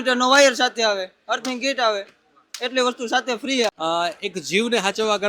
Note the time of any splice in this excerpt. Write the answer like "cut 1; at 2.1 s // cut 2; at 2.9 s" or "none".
cut 1; at 3.7 s